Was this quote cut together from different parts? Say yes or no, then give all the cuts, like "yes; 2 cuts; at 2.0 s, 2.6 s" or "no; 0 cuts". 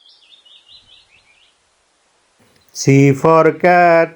yes; 1 cut; at 2.4 s